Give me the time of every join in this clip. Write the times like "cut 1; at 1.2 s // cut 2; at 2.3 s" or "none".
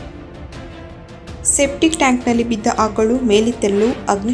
cut 1; at 0.9 s